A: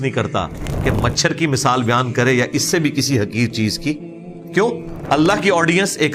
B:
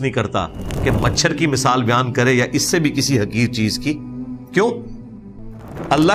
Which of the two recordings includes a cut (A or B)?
A